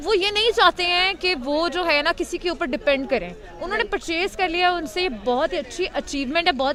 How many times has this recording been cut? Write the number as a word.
zero